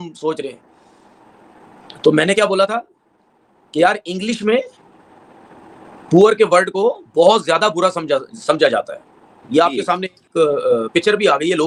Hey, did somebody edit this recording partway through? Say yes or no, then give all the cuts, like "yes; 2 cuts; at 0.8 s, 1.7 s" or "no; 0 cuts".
no; 0 cuts